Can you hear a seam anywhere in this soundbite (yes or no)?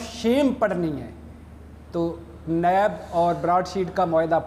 no